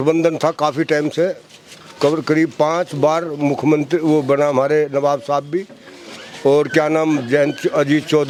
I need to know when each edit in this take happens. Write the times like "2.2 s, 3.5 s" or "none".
none